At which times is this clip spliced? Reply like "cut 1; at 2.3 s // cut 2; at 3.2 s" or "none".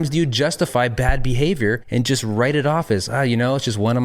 cut 1; at 1.8 s